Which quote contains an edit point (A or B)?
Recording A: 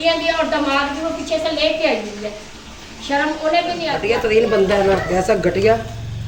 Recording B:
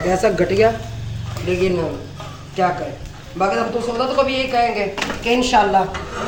A